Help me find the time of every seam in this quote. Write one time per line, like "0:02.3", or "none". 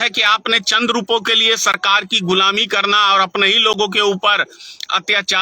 none